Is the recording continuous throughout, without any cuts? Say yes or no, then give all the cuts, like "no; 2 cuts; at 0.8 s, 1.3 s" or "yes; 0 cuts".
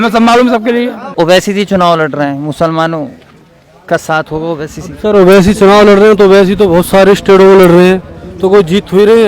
no; 1 cut; at 1.0 s